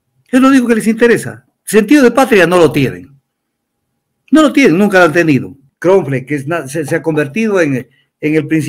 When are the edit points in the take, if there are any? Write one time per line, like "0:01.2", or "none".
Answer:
0:05.6